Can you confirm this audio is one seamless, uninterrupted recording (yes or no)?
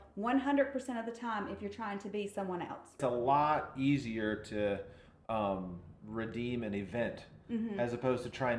no